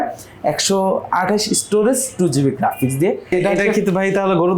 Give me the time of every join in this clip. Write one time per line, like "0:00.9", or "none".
0:03.3

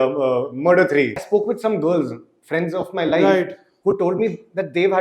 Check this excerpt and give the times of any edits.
0:01.2

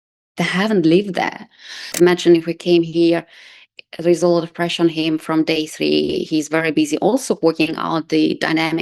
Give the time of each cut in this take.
0:01.9

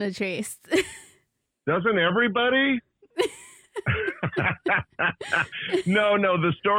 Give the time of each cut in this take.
none

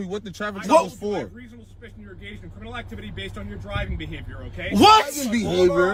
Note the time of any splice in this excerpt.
none

